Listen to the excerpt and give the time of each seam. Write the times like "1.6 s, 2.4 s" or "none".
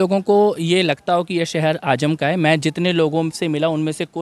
none

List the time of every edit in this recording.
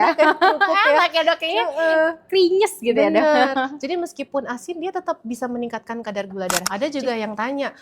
6.7 s

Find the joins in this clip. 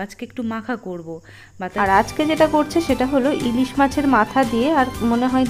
1.6 s

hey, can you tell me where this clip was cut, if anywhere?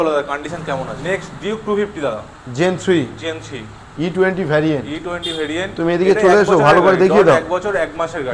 0.9 s

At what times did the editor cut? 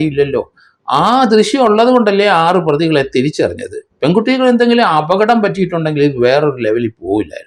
none

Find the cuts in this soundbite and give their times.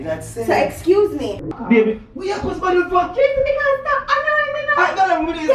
1.3 s

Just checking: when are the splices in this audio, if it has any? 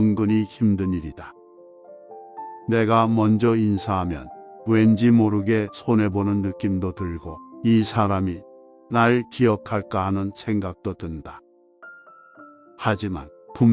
1.3 s, 2.6 s

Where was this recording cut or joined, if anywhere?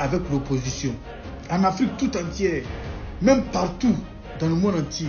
none

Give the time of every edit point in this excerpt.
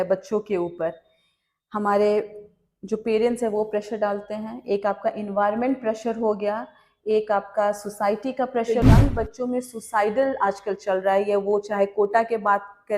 8.7 s

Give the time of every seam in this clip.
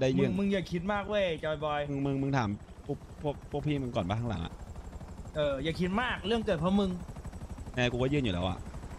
none

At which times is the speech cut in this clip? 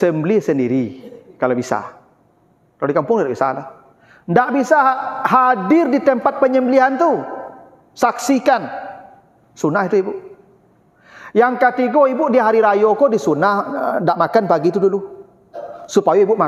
none

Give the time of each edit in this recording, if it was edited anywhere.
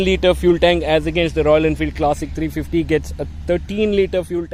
none

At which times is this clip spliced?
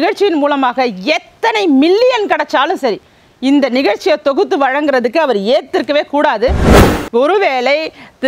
6.8 s

